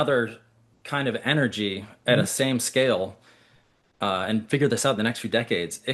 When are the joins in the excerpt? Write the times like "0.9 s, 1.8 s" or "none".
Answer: none